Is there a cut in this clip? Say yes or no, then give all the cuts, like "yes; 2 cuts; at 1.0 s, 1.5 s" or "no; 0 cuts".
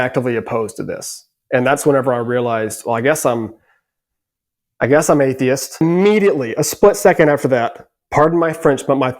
yes; 1 cut; at 5.8 s